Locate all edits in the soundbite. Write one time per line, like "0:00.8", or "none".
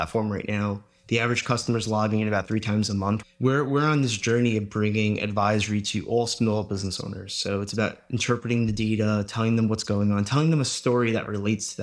0:03.2

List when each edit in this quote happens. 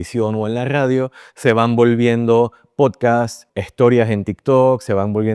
0:03.4

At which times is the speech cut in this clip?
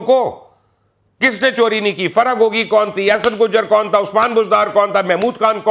none

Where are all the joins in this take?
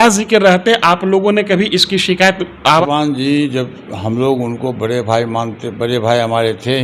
0:02.8

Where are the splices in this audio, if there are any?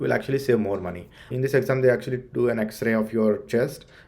0:01.4

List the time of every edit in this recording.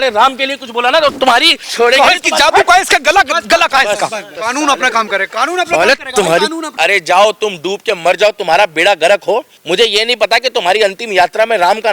0:01.6
0:04.3
0:06.7
0:09.5

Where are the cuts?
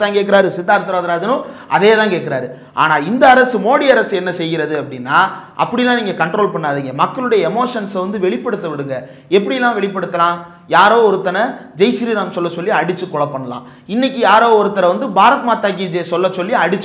none

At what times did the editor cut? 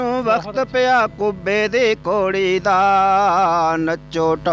none

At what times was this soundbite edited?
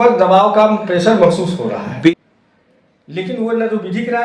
0:02.1

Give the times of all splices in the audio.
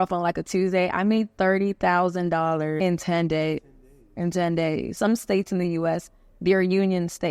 0:02.8
0:04.9

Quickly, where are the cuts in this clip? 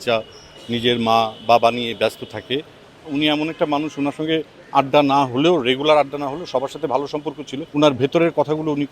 0:03.1
0:07.5

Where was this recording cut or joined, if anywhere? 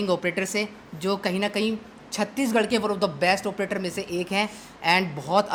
none

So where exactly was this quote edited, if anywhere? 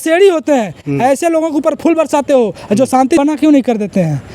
0:03.2

